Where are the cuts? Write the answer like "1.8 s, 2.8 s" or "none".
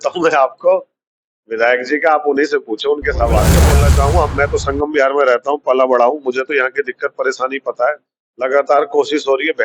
3.7 s

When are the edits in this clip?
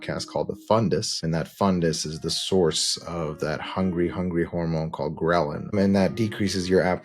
1.2 s, 5.7 s

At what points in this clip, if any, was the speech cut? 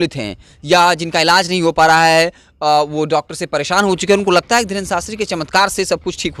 none

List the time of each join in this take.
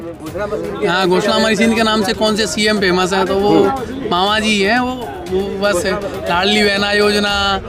none

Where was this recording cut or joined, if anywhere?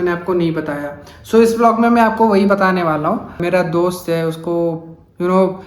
3.4 s

